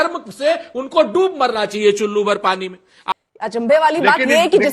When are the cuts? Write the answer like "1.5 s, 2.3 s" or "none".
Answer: 2.9 s